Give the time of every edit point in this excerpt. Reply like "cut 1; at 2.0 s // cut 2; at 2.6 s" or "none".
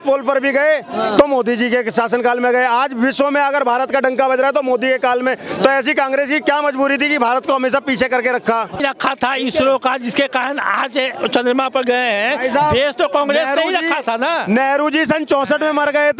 cut 1; at 8.8 s